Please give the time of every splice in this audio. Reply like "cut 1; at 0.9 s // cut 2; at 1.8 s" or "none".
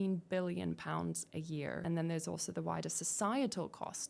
cut 1; at 1.8 s